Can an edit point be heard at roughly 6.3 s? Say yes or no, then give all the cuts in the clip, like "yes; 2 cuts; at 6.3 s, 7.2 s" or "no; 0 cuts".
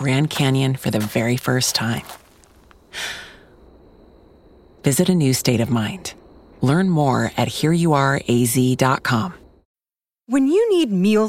no; 1 cut; at 9.6 s